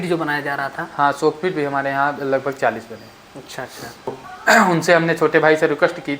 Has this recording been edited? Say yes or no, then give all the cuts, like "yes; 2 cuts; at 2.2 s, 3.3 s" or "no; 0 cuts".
yes; 1 cut; at 4.3 s